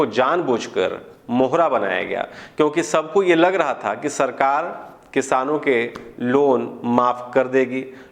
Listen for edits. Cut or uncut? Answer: uncut